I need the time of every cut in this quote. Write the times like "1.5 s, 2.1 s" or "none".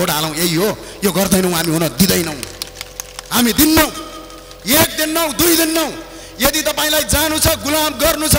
none